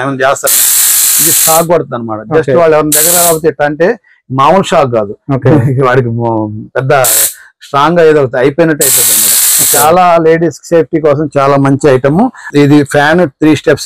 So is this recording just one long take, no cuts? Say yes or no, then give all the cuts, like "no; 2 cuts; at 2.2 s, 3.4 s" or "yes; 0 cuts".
no; 1 cut; at 12.5 s